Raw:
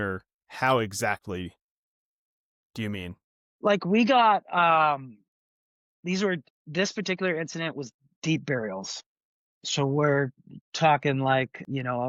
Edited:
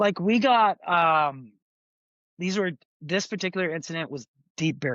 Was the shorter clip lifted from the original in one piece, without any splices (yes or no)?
yes